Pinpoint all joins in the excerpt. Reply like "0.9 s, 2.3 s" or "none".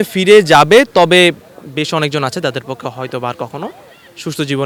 none